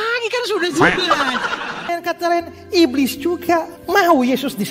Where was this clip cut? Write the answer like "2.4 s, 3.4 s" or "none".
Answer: 1.9 s